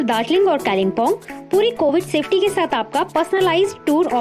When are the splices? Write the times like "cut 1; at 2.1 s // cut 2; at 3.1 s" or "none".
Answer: none